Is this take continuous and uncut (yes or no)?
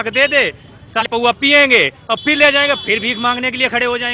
no